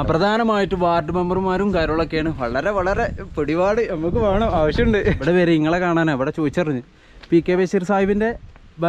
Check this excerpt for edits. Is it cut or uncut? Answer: cut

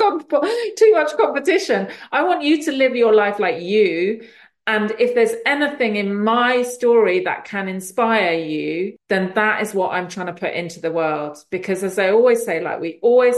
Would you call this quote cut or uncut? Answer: cut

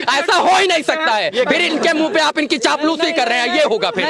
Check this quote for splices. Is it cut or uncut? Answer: uncut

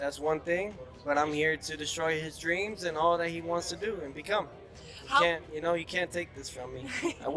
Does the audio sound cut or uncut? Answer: uncut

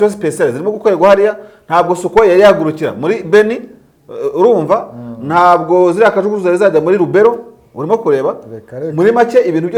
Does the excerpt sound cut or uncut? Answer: uncut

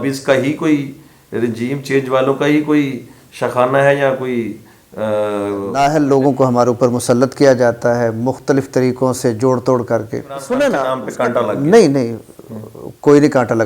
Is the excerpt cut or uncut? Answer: cut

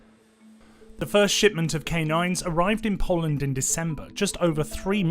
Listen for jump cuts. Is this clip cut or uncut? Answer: cut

